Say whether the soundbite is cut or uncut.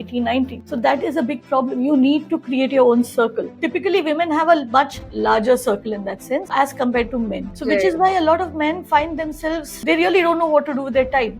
cut